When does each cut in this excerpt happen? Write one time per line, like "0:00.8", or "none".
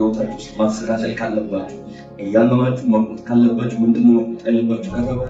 none